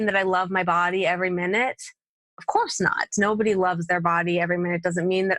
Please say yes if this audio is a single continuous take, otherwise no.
yes